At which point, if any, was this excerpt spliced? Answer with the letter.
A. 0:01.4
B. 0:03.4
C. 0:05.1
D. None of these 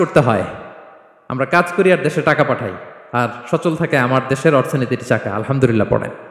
D